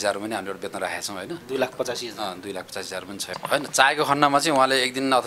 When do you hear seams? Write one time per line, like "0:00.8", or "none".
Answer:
0:03.3